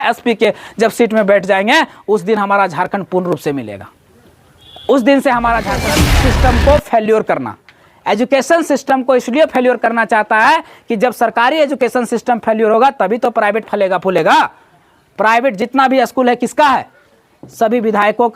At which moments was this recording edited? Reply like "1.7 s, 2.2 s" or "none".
6.0 s